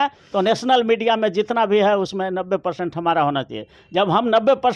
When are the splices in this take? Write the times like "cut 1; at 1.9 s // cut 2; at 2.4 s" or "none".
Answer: none